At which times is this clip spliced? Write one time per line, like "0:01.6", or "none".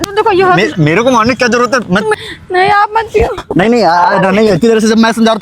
0:02.2